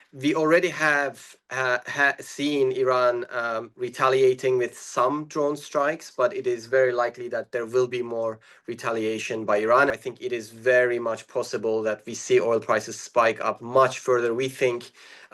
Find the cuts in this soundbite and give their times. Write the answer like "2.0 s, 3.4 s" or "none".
9.9 s

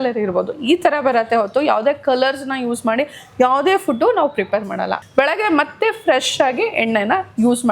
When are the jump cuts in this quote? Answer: 5.0 s

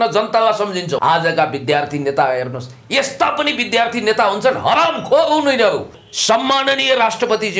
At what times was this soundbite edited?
0.9 s, 6.0 s

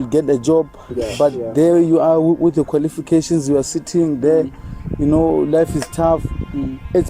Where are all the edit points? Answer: none

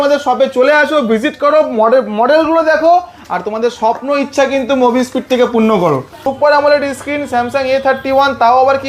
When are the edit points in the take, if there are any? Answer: 6.2 s

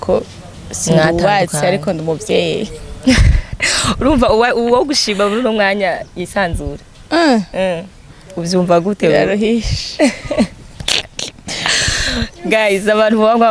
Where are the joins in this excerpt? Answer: none

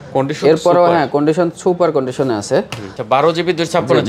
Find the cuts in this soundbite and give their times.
none

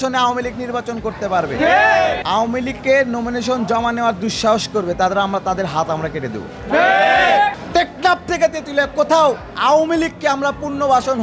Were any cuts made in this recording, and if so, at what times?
2.2 s, 7.6 s

